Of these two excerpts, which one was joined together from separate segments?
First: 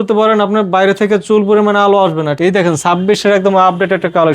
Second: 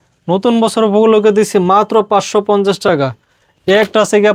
first; 1 cut; at 2.3 s

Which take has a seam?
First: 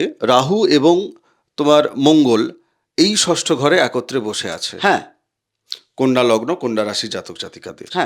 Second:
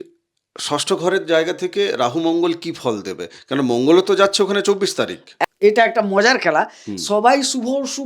second; 1 cut; at 5.5 s

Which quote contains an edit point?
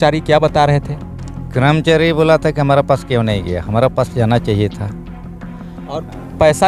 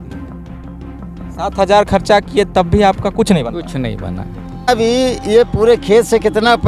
second; 1 cut; at 4.7 s

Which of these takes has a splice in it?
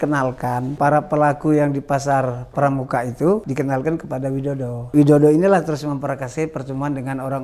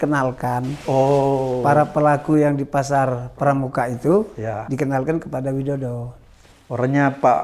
first; 3 cuts; at 0.8 s, 3.5 s, 4.9 s

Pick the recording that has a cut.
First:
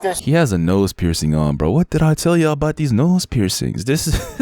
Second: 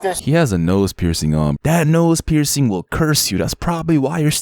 second; 1 cut; at 1.6 s

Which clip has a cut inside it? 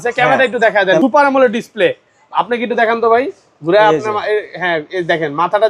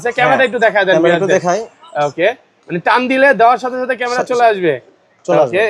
first; 1 cut; at 1.0 s

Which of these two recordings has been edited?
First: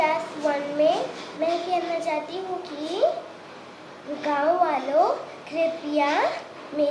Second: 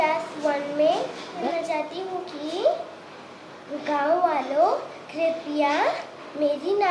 second; 1 cut; at 1.4 s

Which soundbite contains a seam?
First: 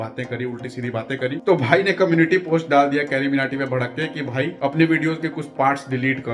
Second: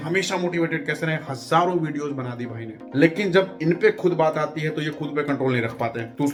first; 1 cut; at 1.4 s

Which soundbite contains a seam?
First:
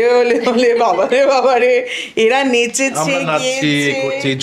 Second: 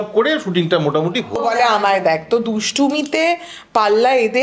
second; 1 cut; at 1.4 s

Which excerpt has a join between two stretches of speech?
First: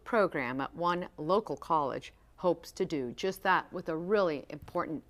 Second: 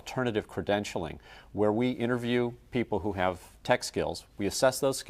first; 1 cut; at 1.8 s

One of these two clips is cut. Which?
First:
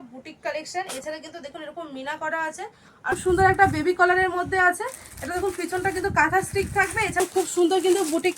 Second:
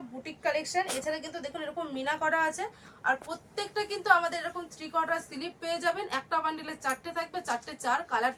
first; 2 cuts; at 3.2 s, 7.2 s

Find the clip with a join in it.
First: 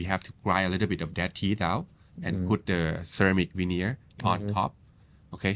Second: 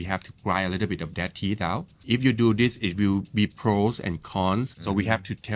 second; 2 cuts; at 2.0 s, 4.8 s

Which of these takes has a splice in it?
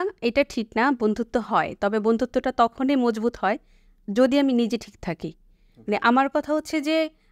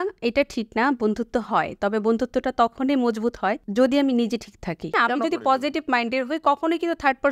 second; 2 cuts; at 3.6 s, 4.9 s

